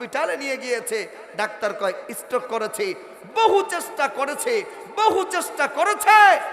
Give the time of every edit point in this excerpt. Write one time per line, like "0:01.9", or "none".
none